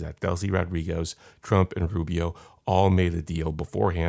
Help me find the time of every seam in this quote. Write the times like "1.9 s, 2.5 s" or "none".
none

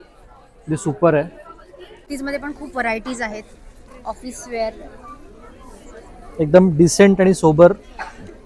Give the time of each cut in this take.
2.1 s

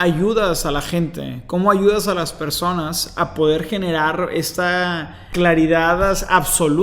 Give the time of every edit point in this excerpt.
5.2 s

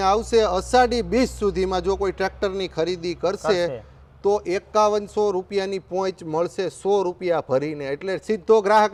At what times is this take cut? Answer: none

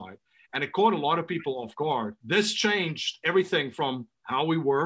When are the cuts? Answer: 2.2 s

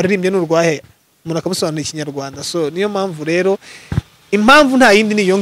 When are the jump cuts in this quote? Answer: none

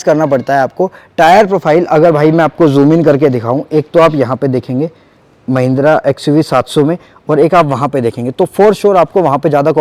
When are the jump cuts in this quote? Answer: none

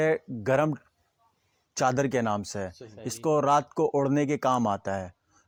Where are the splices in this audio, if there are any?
none

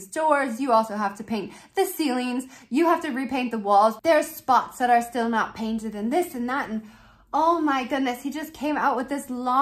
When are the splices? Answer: none

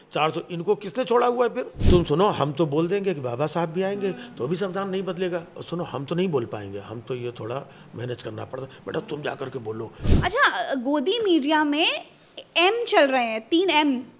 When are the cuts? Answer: 1.7 s, 10.0 s

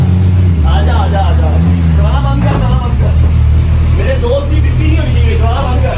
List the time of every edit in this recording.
none

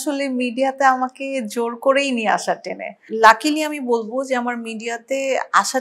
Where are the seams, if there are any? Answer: 3.1 s

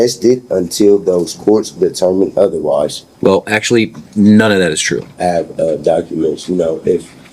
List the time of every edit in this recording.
3.0 s, 5.1 s

